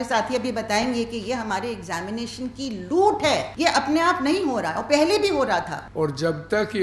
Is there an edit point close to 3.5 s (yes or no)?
yes